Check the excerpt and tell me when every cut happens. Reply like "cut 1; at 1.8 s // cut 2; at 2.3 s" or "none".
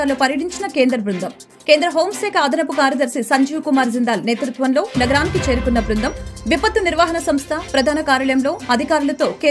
none